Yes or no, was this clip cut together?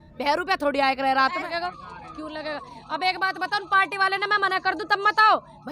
yes